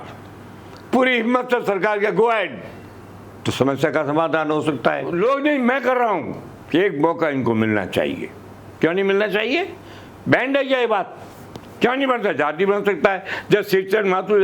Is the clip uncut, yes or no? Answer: no